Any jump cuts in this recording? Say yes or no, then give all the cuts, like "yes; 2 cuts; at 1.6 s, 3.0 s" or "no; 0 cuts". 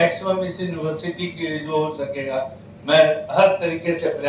no; 0 cuts